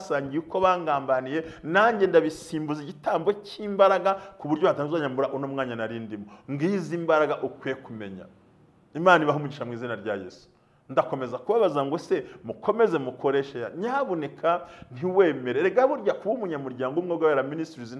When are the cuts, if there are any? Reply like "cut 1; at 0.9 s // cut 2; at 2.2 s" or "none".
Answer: none

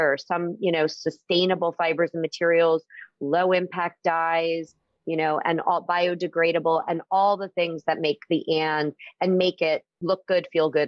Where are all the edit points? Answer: cut 1; at 9.9 s

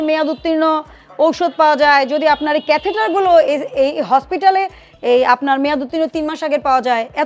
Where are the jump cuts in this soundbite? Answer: none

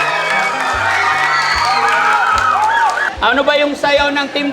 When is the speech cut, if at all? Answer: cut 1; at 3.1 s

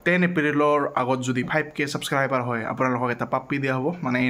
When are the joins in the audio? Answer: none

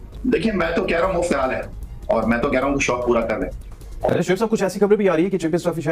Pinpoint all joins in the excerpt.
cut 1; at 4.0 s

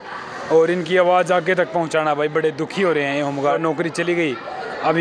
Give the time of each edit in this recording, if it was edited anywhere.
cut 1; at 3.6 s

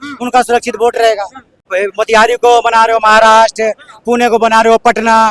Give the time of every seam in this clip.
cut 1; at 1.7 s

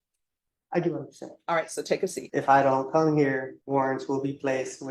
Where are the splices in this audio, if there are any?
cut 1; at 2.2 s // cut 2; at 3.5 s

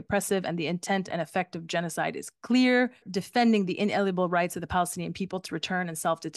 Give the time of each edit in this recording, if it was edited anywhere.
cut 1; at 3.1 s // cut 2; at 5.4 s

